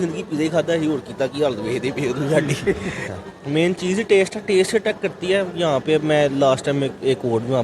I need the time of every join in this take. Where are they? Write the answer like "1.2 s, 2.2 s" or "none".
3.1 s